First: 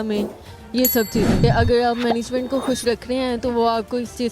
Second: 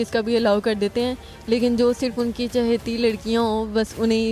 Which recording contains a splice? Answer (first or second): first